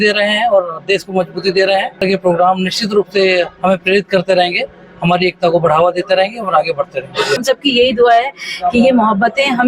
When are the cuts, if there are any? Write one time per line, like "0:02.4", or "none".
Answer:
0:02.0
0:07.4